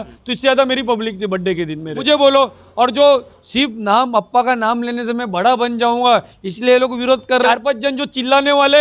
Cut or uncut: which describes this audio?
cut